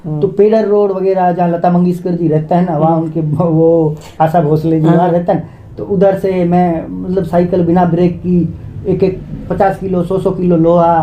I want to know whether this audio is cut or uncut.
uncut